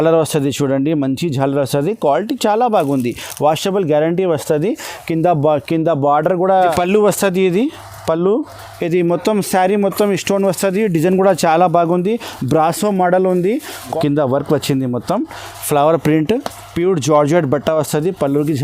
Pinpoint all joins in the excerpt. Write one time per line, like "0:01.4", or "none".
0:06.6
0:13.9